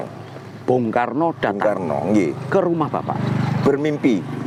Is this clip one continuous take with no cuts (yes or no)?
yes